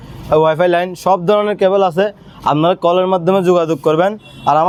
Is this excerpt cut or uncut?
uncut